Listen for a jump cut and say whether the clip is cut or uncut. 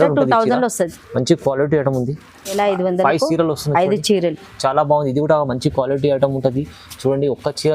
cut